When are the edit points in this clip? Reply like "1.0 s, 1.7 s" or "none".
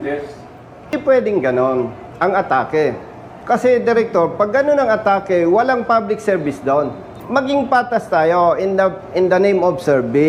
0.9 s, 7.1 s